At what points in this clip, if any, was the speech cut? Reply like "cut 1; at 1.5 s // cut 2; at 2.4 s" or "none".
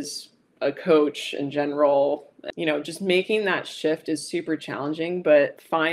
cut 1; at 2.5 s